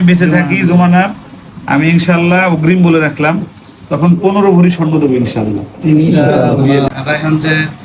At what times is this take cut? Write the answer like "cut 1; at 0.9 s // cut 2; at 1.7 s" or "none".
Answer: cut 1; at 6.9 s

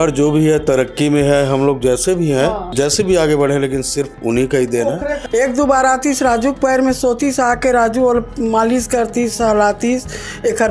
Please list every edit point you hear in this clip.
cut 1; at 2.6 s // cut 2; at 4.1 s // cut 3; at 5.2 s

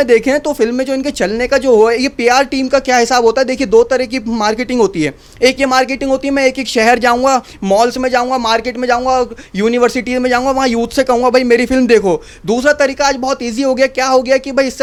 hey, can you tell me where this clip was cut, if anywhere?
none

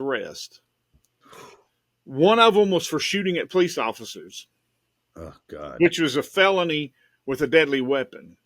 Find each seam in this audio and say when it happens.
none

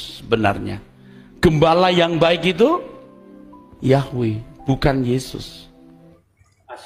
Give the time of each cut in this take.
cut 1; at 5.9 s

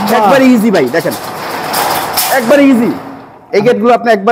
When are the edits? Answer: cut 1; at 3.4 s

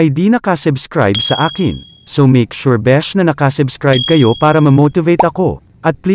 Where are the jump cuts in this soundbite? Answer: none

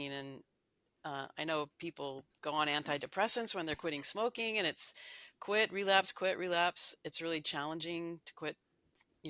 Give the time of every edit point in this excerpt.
none

